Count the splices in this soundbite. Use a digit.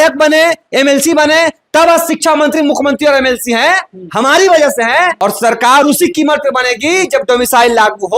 1